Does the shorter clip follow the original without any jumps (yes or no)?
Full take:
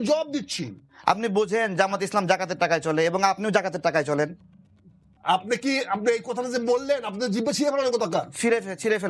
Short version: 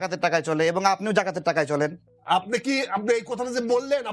no